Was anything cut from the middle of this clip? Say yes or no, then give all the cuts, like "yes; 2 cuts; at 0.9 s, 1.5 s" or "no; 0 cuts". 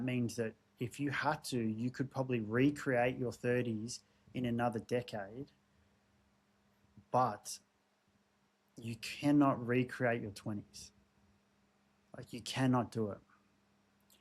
no; 0 cuts